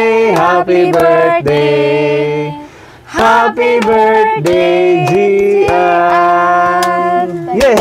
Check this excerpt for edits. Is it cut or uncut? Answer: uncut